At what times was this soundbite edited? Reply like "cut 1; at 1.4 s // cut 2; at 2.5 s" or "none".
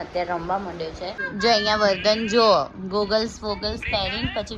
cut 1; at 1.2 s